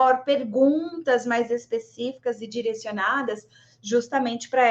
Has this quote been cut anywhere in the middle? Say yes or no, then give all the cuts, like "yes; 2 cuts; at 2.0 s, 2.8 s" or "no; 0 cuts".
no; 0 cuts